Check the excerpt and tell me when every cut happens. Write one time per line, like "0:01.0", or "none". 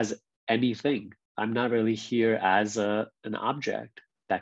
0:01.2